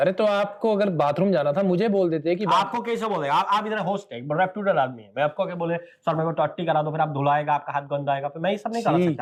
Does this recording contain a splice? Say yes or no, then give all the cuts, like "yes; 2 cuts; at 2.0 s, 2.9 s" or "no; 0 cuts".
no; 0 cuts